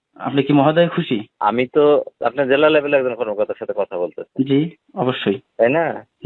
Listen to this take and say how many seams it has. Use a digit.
2